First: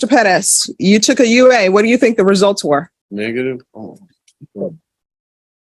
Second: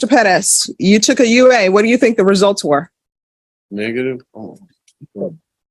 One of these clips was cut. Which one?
first; 1 cut; at 3.0 s

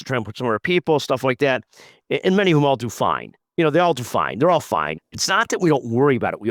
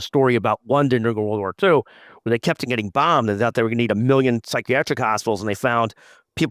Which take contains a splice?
first; 1 cut; at 4.9 s

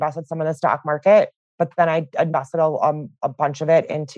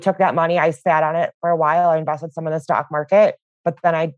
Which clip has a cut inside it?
first; 1 cut; at 3.2 s

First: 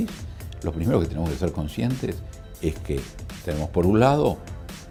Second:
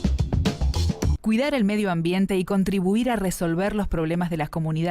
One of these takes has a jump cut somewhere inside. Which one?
second; 1 cut; at 1.2 s

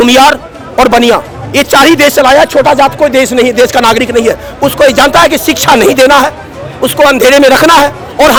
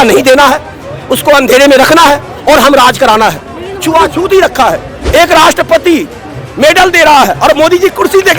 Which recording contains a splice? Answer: second; 1 cut; at 4.9 s

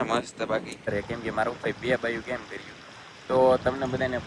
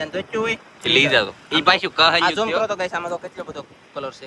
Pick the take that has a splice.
first; 1 cut; at 0.9 s

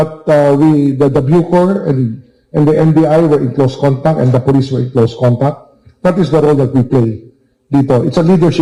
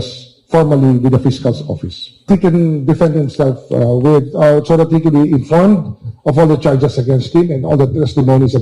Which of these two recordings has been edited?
second; 1 cut; at 2.3 s

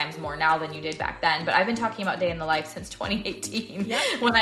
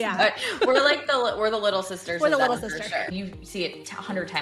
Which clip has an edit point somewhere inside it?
second; 1 cut; at 3.1 s

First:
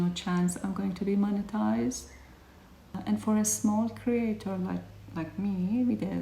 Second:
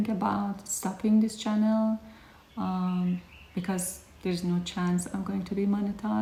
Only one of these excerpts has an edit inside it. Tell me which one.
first; 1 cut; at 2.9 s

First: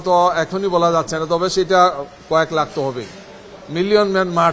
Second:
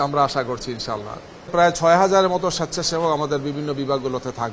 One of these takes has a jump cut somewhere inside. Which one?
second; 1 cut; at 1.5 s

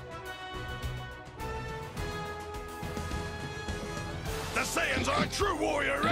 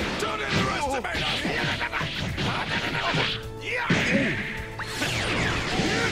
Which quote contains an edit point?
first; 1 cut; at 4.5 s

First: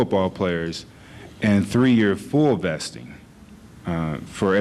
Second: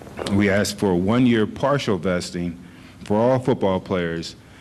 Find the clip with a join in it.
second; 1 cut; at 1.3 s

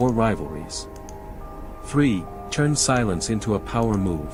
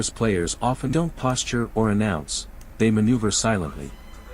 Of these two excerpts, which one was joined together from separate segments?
second; 1 cut; at 0.9 s

